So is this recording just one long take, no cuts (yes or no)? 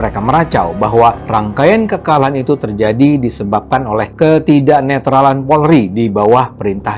yes